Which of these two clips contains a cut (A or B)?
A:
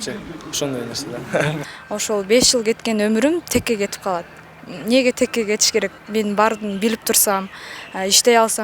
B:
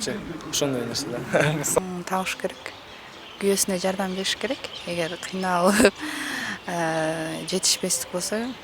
A